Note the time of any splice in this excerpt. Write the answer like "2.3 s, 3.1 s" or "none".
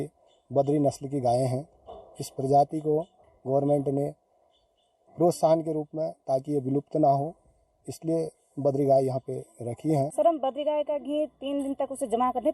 10.1 s